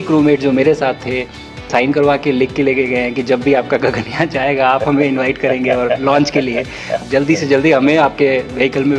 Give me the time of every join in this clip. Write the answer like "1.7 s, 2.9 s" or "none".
1.7 s, 7.0 s